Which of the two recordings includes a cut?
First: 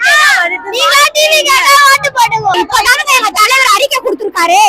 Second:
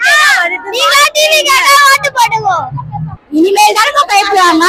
first; 1 cut; at 2.6 s

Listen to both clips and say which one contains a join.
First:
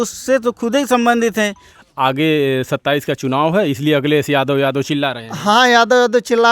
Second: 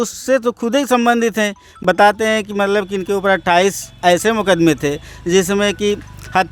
first; 1 cut; at 1.7 s

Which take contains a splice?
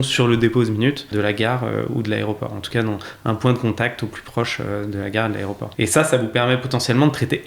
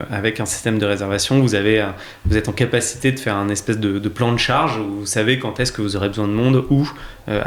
first; 2 cuts; at 1.1 s, 5.6 s

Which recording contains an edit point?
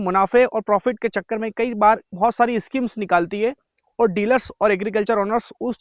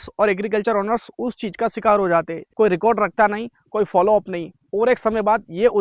second; 1 cut; at 2.4 s

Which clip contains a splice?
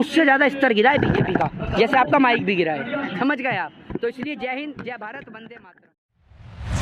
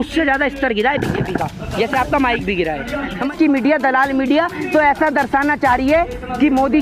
second; 1 cut; at 3.3 s

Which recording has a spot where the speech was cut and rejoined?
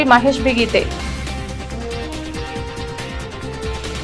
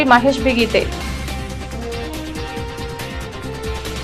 first; 2 cuts; at 0.9 s, 2.6 s

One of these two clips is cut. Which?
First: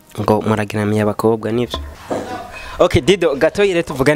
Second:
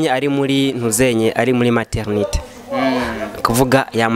first; 1 cut; at 2.0 s

